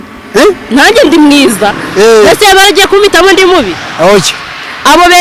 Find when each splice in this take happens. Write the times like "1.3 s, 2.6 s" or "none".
none